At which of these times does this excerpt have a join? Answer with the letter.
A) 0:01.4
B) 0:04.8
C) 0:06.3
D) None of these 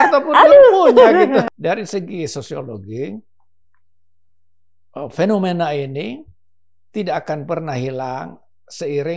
A